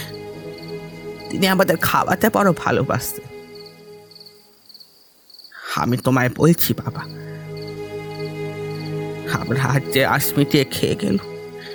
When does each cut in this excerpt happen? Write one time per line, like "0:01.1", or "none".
none